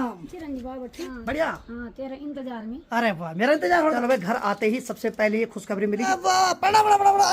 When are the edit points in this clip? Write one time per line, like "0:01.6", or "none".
0:01.0
0:04.0
0:06.1

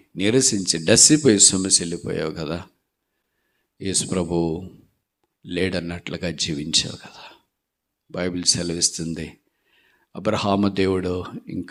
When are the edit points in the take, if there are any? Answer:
none

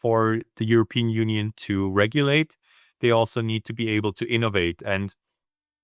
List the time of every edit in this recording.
none

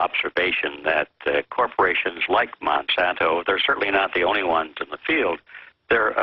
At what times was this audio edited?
none

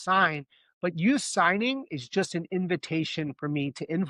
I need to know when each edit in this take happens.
none

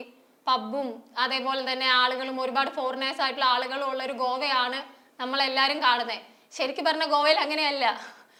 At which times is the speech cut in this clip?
none

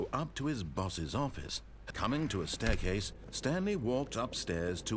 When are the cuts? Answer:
0:01.8

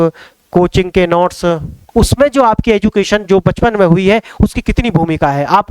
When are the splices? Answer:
0:01.8

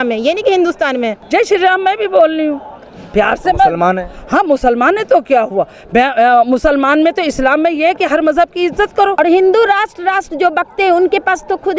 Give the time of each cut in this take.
0:01.2
0:09.1

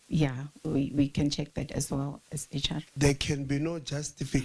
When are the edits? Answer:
0:02.9

